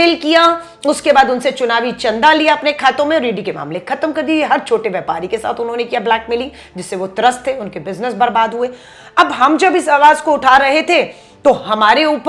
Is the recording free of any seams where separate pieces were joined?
yes; 0 cuts

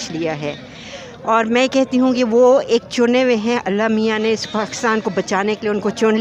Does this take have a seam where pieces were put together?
no; 0 cuts

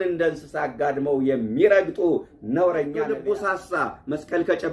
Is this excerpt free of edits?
no; 1 cut; at 3.1 s

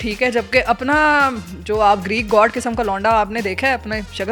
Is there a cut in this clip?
no; 0 cuts

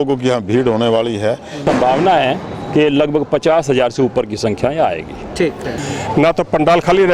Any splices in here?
yes; 2 cuts; at 1.6 s, 5.8 s

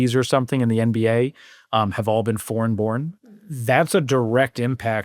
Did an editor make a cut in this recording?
yes; 1 cut; at 3.2 s

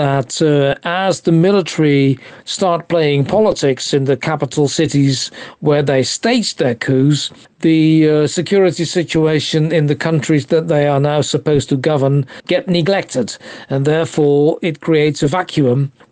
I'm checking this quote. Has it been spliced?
no; 0 cuts

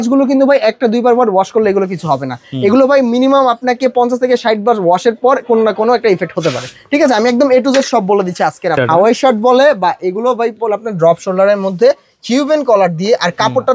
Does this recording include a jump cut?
yes; 1 cut; at 8.8 s

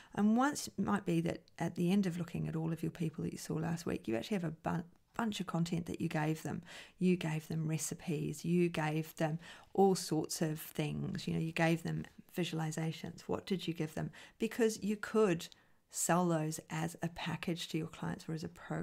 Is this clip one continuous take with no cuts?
no; 1 cut; at 12.2 s

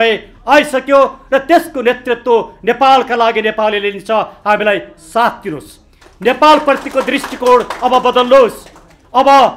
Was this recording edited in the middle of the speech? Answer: no; 0 cuts

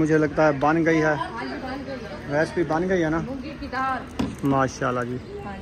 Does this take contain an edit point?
no; 0 cuts

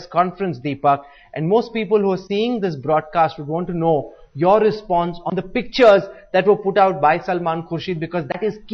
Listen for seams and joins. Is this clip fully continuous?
no; 1 cut; at 6.1 s

